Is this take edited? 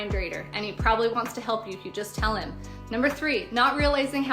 yes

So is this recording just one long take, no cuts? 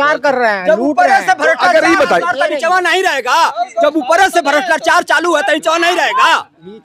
yes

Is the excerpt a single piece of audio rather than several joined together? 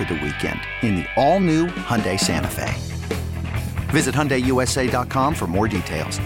yes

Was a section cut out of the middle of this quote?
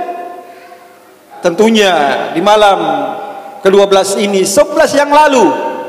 yes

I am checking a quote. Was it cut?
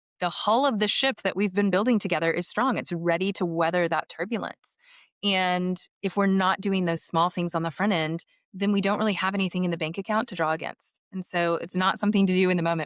no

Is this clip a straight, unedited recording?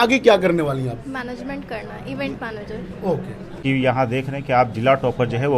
no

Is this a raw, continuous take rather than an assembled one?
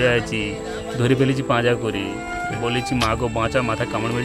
yes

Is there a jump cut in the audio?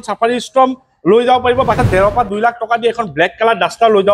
yes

